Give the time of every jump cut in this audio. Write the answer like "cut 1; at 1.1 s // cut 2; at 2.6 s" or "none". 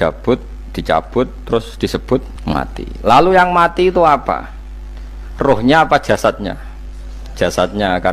none